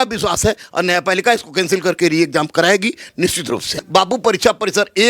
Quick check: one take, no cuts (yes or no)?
no